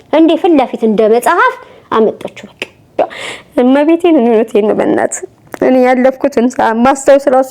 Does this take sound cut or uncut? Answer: cut